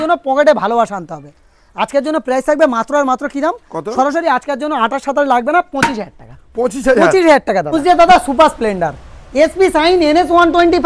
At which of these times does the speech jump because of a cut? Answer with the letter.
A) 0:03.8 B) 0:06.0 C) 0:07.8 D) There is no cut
C